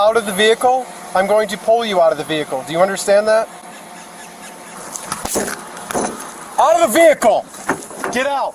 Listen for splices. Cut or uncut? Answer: cut